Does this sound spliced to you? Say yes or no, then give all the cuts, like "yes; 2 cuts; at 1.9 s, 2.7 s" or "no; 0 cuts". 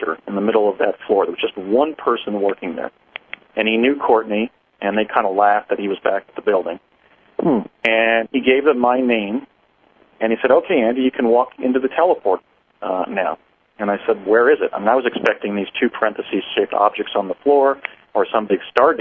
no; 0 cuts